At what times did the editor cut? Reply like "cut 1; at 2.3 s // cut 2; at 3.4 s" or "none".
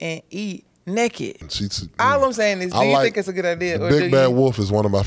cut 1; at 1.5 s